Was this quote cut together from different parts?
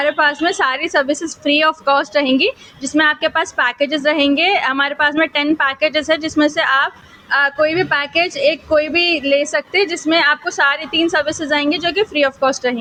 no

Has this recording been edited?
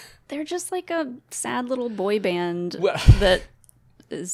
no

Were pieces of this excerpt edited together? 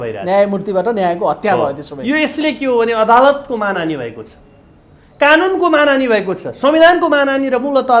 no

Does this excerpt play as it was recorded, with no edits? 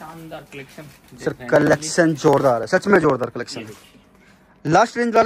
yes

